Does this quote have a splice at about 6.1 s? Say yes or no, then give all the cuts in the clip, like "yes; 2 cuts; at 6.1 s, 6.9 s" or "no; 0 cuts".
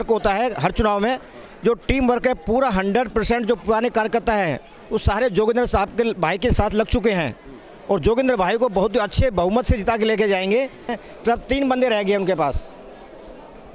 no; 1 cut; at 10.9 s